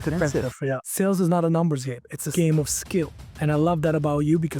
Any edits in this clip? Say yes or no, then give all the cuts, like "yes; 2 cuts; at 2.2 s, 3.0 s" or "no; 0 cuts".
yes; 3 cuts; at 0.8 s, 2.1 s, 3.3 s